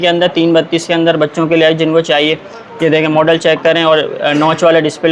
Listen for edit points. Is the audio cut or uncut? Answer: uncut